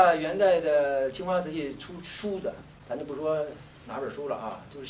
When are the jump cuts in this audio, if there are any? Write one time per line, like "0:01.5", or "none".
0:02.7